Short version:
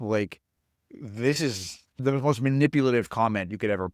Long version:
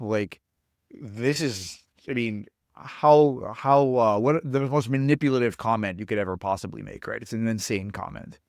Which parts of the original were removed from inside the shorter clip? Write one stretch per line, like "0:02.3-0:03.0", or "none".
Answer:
0:02.0-0:04.5